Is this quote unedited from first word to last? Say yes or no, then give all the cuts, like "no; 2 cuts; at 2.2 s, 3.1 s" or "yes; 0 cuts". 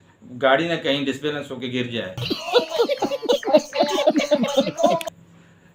yes; 0 cuts